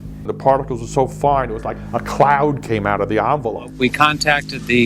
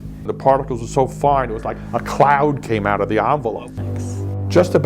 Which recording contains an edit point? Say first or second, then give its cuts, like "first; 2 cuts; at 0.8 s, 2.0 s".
second; 1 cut; at 3.7 s